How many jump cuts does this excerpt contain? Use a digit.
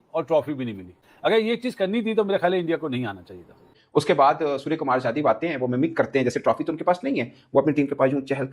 2